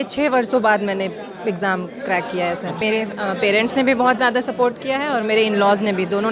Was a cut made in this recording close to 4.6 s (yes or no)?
no